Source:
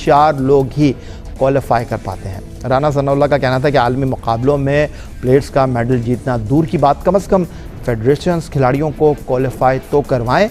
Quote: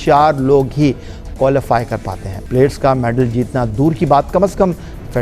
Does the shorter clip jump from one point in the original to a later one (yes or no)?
yes